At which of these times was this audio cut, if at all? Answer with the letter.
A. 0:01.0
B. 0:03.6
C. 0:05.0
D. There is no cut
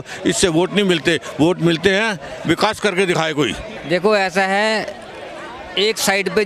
B